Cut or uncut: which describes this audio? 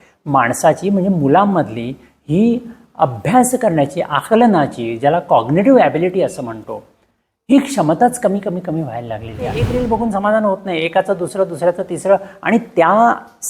cut